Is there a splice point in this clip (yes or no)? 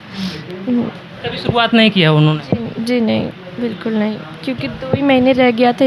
no